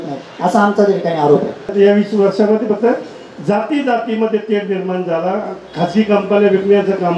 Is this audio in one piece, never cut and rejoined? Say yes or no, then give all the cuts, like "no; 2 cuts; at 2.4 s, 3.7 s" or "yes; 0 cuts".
no; 1 cut; at 1.7 s